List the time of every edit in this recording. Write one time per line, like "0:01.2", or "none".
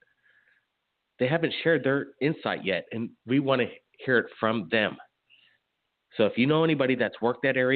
0:06.1